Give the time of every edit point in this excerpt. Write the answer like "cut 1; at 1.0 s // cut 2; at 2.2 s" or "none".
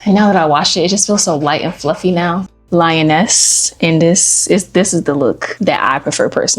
cut 1; at 2.5 s // cut 2; at 5.5 s